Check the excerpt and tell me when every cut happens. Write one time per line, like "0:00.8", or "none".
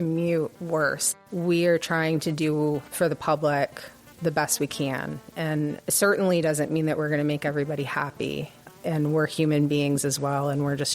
0:01.1
0:02.9